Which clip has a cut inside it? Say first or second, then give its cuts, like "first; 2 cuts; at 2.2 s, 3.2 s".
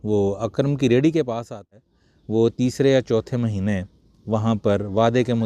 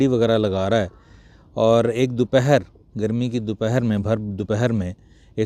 first; 1 cut; at 1.7 s